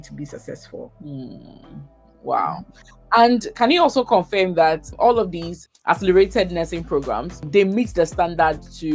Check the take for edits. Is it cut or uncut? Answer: cut